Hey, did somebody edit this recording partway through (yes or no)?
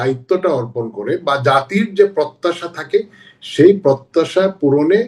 no